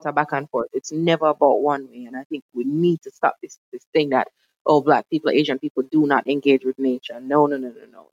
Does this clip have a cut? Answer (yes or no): no